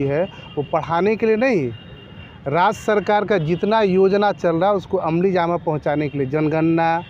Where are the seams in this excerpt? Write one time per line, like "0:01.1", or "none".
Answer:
none